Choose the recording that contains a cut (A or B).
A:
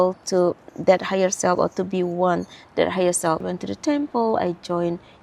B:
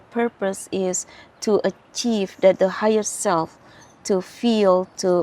A